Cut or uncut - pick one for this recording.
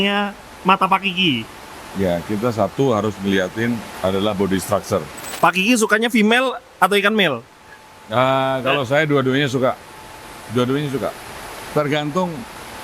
cut